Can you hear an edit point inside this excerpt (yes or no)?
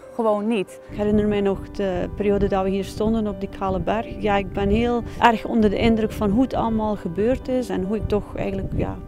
yes